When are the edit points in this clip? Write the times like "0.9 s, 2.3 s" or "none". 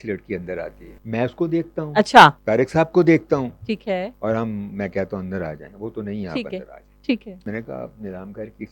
0.9 s, 2.4 s, 4.1 s, 7.3 s